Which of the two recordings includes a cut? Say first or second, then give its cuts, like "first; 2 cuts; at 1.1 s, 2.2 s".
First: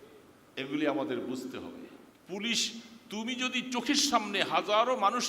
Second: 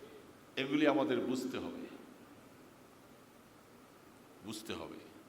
first; 1 cut; at 2.1 s